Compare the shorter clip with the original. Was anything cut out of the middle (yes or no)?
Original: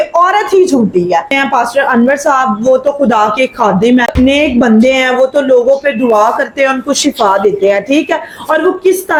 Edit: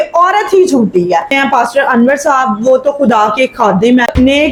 no